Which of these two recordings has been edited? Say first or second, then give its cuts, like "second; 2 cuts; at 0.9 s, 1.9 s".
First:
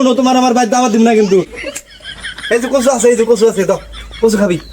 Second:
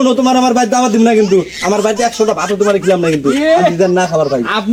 first; 1 cut; at 1.5 s